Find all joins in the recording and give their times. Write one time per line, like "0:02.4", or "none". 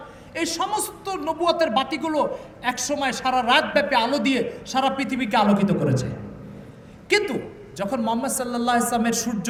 none